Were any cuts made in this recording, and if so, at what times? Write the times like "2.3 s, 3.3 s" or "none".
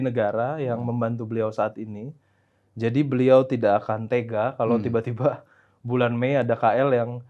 none